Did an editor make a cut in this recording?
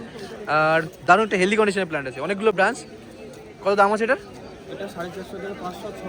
no; 0 cuts

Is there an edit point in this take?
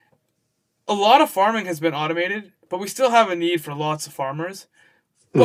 no; 0 cuts

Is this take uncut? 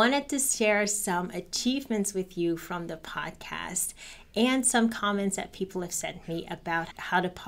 yes; 0 cuts

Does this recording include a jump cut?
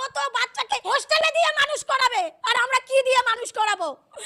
yes; 2 cuts; at 0.8 s, 2.4 s

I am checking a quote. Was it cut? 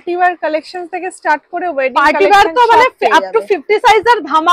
no; 0 cuts

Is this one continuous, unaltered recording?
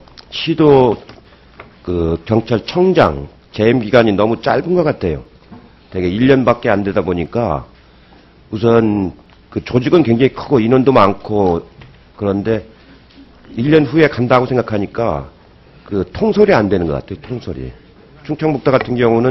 yes; 0 cuts

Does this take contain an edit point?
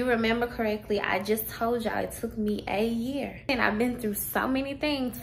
yes; 1 cut; at 3.4 s

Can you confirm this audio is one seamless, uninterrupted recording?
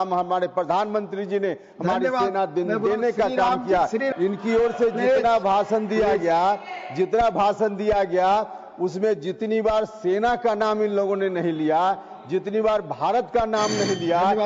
no; 1 cut; at 4.1 s

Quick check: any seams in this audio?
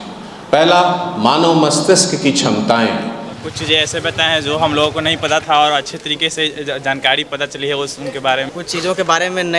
yes; 2 cuts; at 3.4 s, 8.5 s

